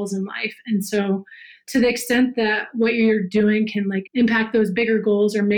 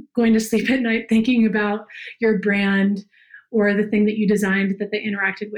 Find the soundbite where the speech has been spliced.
first; 3 cuts; at 1.6 s, 4.0 s, 4.7 s

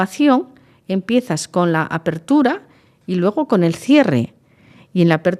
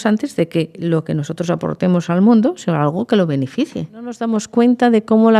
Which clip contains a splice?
second; 1 cut; at 4.2 s

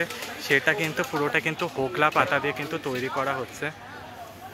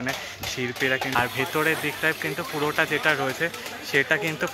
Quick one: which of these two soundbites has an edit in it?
second; 1 cut; at 1.1 s

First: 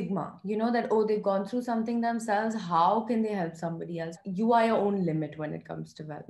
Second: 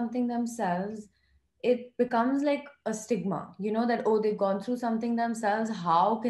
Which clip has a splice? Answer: first; 1 cut; at 4.2 s

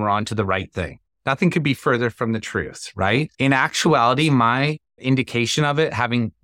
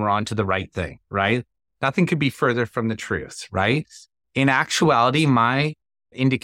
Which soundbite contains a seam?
first; 3 cuts; at 1.0 s, 3.3 s, 4.9 s

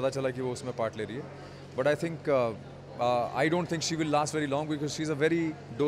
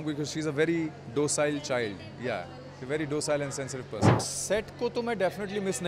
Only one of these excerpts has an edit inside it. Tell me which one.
second; 1 cut; at 4.3 s

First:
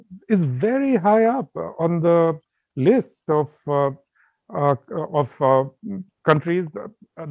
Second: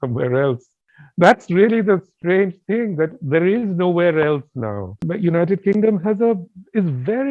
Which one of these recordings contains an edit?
second; 1 cut; at 5.0 s

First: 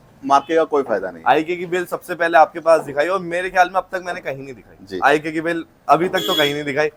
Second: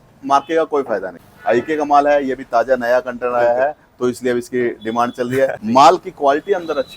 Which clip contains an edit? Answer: second; 2 cuts; at 1.2 s, 5.6 s

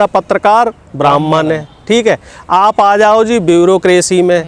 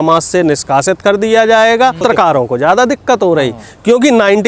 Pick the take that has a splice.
second; 1 cut; at 2.0 s

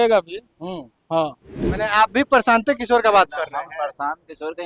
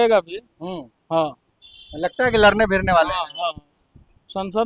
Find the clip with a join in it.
first; 1 cut; at 1.7 s

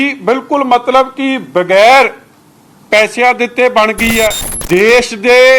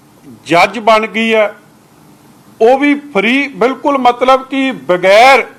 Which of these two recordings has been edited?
first; 1 cut; at 4.5 s

